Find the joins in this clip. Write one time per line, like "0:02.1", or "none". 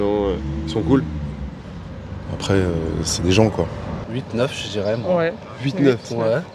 0:04.0

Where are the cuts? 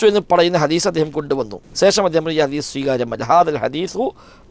0:01.6

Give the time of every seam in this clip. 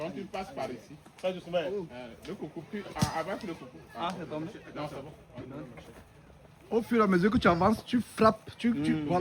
none

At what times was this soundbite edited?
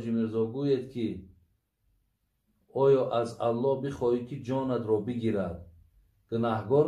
none

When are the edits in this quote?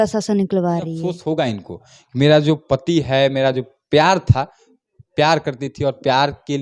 0:01.2

